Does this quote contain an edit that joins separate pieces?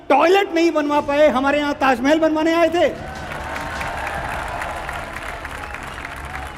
no; 0 cuts

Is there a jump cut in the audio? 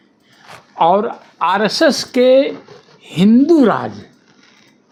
no; 0 cuts

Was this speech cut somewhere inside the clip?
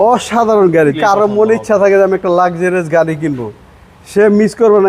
yes; 1 cut; at 1.0 s

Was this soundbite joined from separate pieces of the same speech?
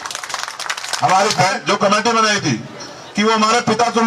yes; 1 cut; at 1.4 s

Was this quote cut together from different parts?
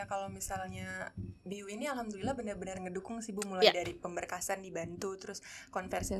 no; 0 cuts

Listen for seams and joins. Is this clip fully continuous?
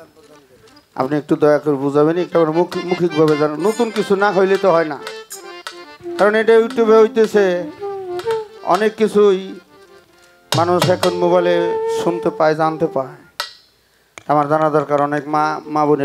yes; 0 cuts

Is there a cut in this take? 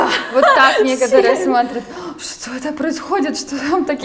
no; 0 cuts

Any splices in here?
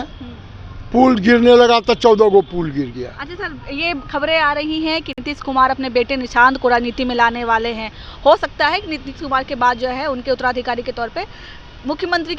no; 0 cuts

